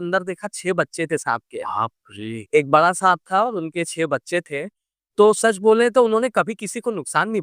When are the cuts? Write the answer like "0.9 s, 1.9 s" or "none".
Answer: none